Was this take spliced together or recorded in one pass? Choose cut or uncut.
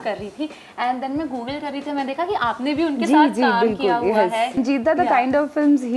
cut